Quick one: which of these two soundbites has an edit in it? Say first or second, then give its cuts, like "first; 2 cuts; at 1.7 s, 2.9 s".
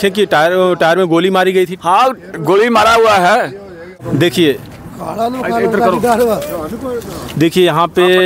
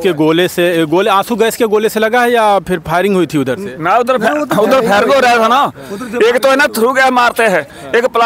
first; 1 cut; at 4.0 s